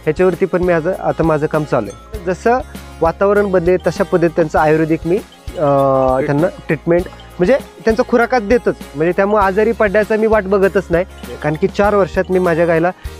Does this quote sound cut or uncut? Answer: cut